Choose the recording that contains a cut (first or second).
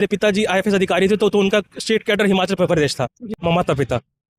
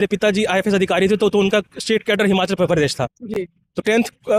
first